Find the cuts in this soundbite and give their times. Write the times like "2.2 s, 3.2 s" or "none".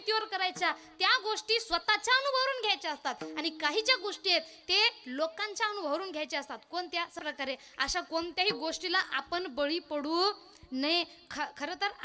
7.2 s